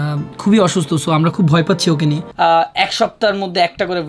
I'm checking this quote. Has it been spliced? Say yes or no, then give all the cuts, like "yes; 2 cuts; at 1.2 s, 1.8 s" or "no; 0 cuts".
yes; 1 cut; at 2.2 s